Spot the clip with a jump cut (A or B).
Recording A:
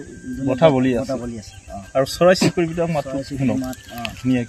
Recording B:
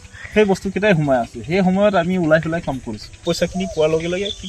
B